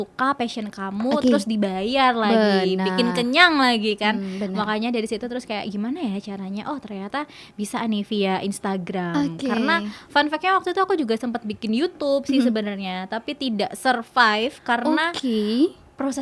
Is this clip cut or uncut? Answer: uncut